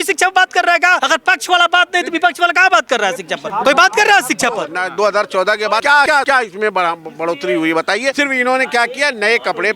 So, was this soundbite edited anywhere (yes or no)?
yes